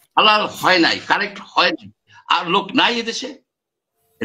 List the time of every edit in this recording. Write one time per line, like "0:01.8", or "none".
0:02.1